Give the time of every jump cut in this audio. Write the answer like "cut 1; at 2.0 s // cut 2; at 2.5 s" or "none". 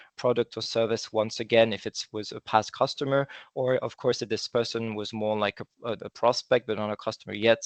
none